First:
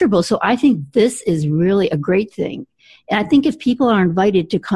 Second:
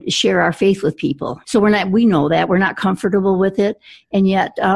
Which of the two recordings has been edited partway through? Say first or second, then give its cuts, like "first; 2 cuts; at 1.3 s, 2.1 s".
second; 1 cut; at 1.4 s